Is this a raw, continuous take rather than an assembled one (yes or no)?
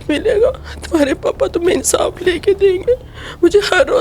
yes